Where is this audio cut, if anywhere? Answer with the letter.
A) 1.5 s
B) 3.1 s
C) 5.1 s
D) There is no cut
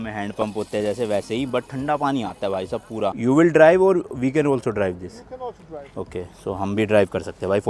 B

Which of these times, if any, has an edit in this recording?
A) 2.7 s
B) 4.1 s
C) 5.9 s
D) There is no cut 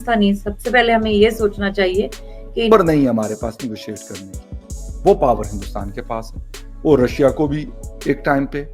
A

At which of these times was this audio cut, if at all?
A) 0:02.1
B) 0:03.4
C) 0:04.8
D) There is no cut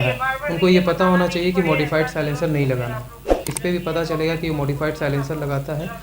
B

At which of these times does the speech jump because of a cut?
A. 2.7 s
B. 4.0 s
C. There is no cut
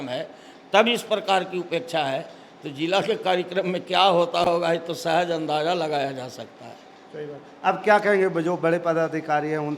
C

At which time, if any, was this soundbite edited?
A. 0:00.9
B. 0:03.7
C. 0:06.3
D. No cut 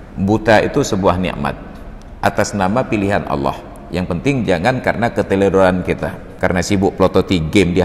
C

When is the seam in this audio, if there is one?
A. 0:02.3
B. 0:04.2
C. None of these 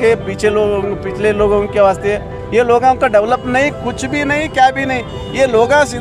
A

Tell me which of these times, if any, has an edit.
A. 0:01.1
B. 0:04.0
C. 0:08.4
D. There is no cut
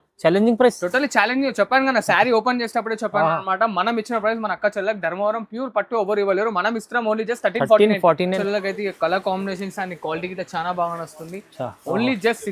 C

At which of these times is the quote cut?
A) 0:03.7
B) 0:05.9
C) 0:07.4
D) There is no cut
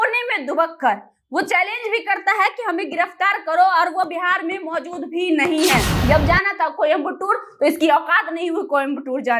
B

